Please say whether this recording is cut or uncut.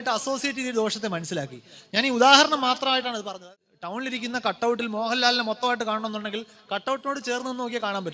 cut